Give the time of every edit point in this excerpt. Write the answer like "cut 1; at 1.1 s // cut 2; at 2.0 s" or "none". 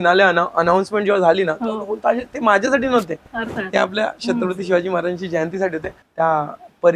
cut 1; at 6.0 s